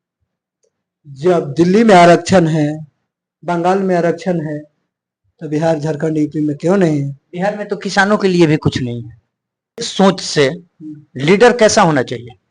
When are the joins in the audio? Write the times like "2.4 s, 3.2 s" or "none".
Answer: 9.9 s

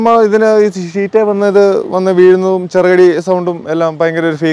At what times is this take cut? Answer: none

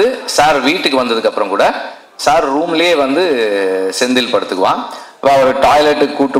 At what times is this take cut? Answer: none

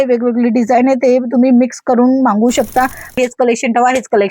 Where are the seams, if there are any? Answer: 3.2 s

